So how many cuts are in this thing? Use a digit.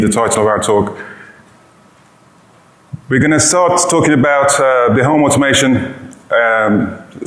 1